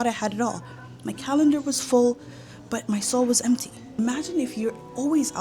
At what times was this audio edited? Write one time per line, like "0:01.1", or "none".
0:03.8

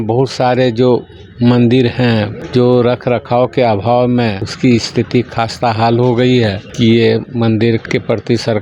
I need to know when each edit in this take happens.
0:02.4
0:04.5
0:06.6
0:07.8

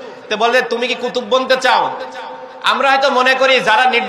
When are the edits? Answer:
0:02.1

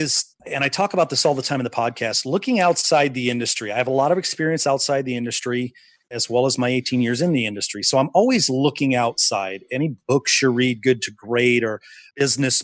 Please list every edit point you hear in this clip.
0:06.1

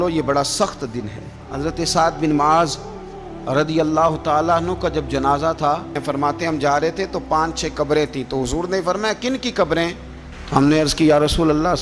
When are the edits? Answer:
0:01.4
0:06.0

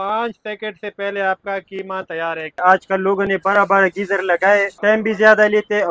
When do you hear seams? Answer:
0:02.6
0:04.7

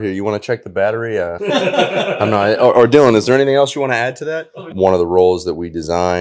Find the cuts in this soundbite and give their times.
0:04.7

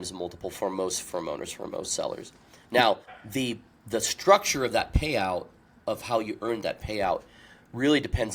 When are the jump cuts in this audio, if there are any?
none

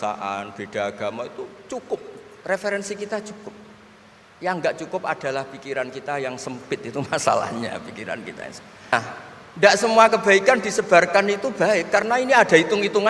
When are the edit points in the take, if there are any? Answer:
0:08.9

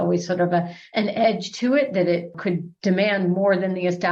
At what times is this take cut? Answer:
none

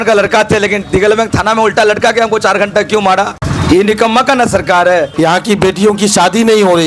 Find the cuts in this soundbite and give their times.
0:03.5
0:05.1

